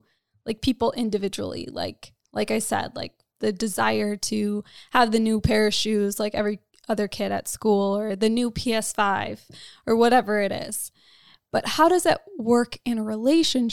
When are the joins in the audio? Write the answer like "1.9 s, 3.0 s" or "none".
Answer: none